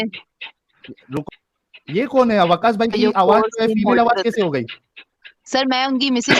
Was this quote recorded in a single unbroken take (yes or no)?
no